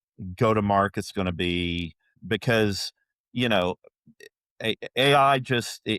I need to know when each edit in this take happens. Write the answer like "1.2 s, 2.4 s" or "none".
2.2 s